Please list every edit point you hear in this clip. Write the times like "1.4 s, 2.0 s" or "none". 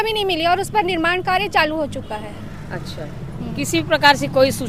none